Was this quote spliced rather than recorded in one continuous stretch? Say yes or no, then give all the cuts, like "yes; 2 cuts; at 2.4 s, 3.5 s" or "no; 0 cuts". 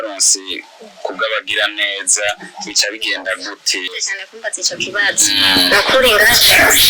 yes; 1 cut; at 4.1 s